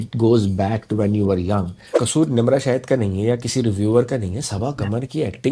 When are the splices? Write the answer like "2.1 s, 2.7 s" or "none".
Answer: 2.0 s